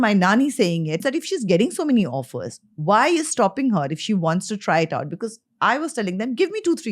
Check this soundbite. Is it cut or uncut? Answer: cut